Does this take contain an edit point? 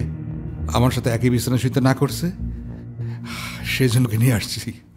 no; 0 cuts

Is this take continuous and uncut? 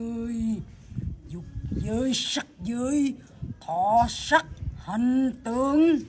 yes; 0 cuts

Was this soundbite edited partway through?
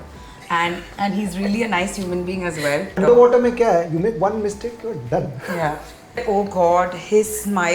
yes; 2 cuts; at 3.0 s, 6.2 s

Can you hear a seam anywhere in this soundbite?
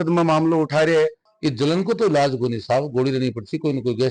yes; 1 cut; at 1.3 s

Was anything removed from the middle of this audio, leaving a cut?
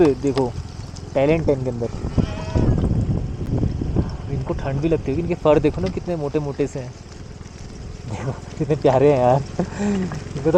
no; 0 cuts

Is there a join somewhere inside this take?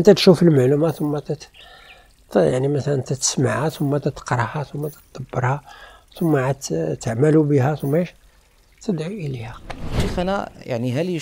yes; 1 cut; at 10.0 s

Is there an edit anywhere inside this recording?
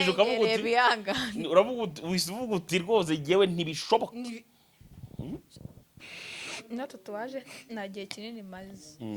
yes; 1 cut; at 5.8 s

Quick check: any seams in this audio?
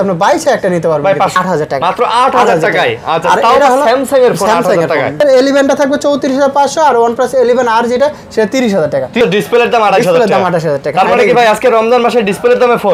yes; 3 cuts; at 1.3 s, 5.2 s, 9.2 s

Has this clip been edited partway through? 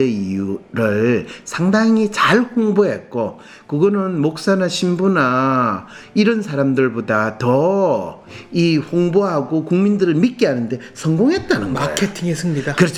no; 0 cuts

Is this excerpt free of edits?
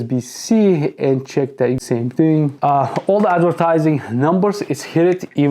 no; 1 cut; at 2.5 s

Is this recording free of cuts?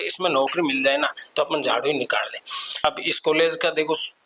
no; 1 cut; at 2.8 s

